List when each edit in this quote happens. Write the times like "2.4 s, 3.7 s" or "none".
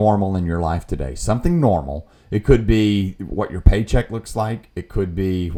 none